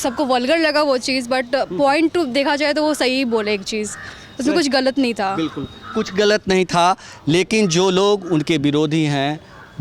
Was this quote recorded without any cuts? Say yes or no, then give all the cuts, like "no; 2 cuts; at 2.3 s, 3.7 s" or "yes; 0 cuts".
yes; 0 cuts